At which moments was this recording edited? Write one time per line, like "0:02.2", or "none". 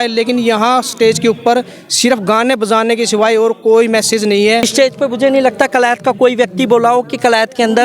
0:04.7